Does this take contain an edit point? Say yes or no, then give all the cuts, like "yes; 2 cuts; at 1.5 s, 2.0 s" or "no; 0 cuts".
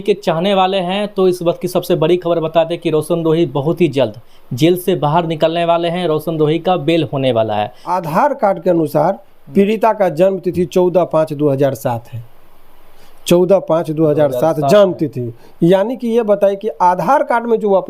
yes; 1 cut; at 7.9 s